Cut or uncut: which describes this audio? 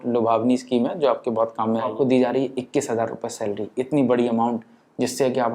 cut